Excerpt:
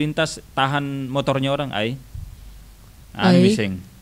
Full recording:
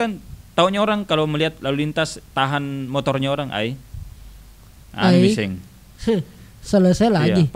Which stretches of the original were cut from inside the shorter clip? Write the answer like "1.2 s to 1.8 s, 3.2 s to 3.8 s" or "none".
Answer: none